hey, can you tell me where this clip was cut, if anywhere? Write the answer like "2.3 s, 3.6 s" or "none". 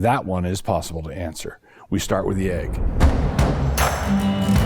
2.8 s